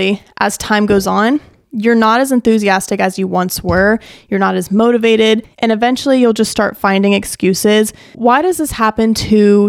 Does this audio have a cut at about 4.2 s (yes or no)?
no